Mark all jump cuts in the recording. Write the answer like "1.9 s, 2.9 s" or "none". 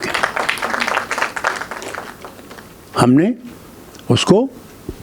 none